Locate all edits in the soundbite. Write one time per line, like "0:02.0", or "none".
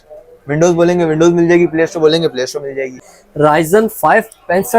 0:03.0